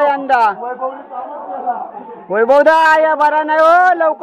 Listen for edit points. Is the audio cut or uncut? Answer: uncut